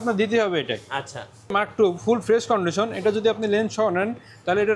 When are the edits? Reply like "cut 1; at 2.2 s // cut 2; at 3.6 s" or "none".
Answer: cut 1; at 1.5 s

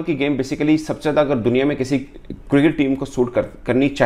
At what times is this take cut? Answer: none

